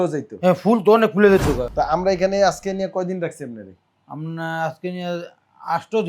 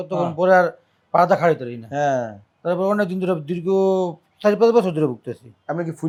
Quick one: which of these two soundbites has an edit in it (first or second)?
first